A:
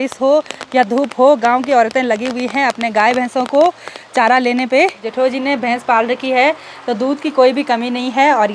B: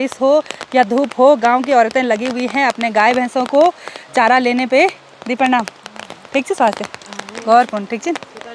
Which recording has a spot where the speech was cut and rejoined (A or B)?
A